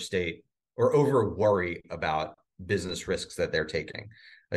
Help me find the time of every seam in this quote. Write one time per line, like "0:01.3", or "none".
none